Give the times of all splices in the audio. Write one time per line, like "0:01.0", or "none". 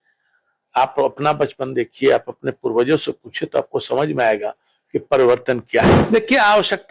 0:06.0